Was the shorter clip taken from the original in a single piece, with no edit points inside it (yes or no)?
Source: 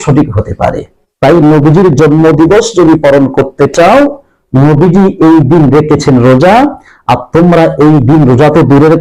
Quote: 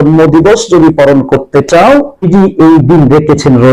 no